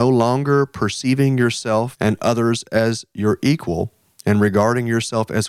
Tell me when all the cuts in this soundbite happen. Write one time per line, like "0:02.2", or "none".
0:01.9

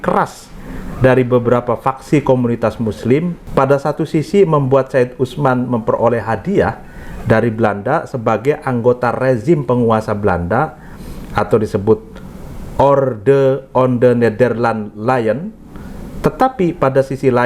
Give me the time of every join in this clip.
0:03.4

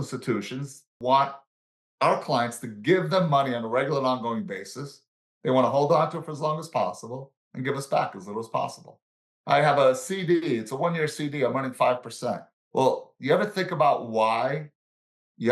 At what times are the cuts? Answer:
0:00.9

